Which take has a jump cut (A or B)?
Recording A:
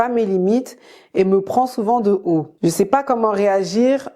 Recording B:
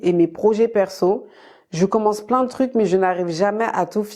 A